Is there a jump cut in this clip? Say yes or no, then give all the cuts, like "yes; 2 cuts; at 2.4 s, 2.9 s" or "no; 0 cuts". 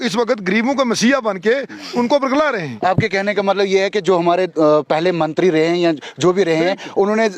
no; 0 cuts